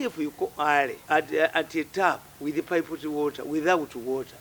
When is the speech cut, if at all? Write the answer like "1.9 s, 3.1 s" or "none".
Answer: 1.0 s, 2.3 s